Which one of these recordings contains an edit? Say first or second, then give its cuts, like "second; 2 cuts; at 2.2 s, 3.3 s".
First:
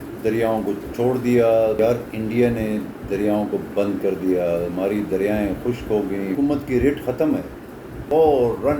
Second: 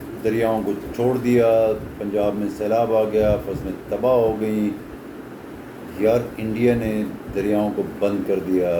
first; 3 cuts; at 1.8 s, 6.3 s, 8.0 s